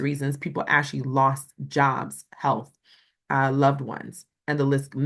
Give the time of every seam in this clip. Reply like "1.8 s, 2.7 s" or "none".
none